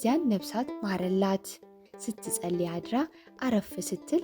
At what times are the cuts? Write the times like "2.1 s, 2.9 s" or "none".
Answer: 1.9 s